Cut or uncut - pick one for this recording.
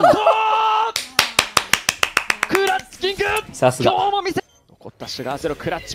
cut